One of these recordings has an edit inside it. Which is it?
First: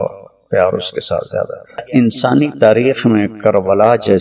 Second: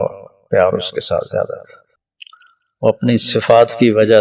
first; 1 cut; at 1.9 s

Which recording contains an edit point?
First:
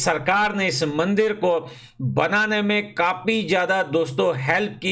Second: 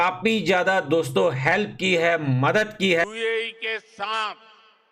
second; 1 cut; at 2.9 s

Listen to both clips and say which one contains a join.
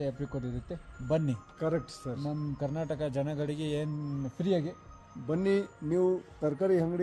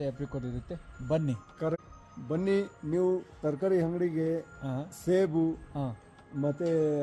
second; 1 cut; at 1.9 s

